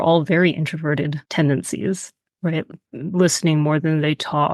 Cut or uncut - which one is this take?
cut